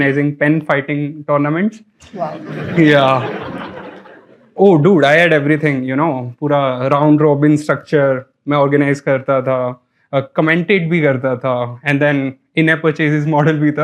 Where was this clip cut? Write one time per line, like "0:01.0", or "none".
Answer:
none